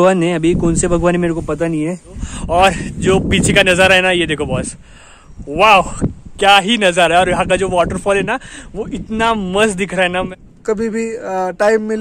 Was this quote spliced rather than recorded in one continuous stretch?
yes; 2 cuts; at 2.3 s, 10.3 s

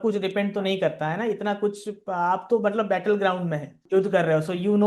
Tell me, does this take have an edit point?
yes; 1 cut; at 3.8 s

